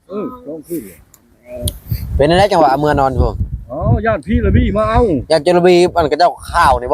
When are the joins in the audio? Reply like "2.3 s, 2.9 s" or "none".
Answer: none